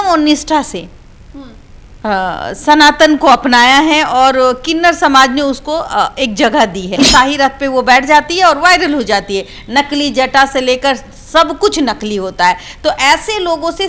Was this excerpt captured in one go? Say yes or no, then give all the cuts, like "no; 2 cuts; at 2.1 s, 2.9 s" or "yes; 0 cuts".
no; 1 cut; at 7.0 s